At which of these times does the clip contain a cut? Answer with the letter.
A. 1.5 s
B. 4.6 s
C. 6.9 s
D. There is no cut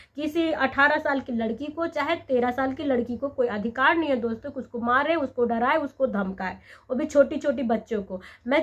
D